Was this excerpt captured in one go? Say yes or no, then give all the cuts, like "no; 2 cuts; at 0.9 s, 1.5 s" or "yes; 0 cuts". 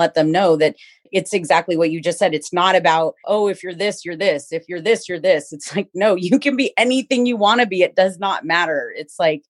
no; 2 cuts; at 1.1 s, 3.2 s